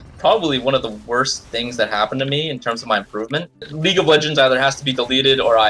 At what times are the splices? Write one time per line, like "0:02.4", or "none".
0:03.7